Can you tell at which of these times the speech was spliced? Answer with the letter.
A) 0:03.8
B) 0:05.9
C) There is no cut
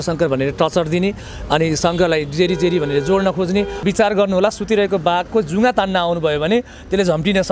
A